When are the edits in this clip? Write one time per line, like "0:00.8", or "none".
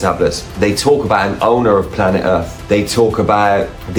none